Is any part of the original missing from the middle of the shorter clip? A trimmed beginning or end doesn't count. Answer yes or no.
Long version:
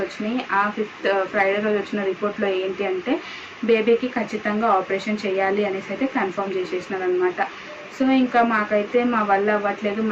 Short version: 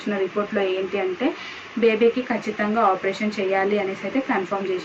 no